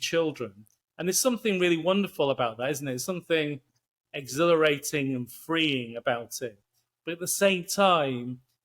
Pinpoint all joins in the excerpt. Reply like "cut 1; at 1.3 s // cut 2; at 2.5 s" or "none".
none